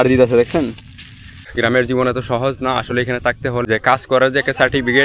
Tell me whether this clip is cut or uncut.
cut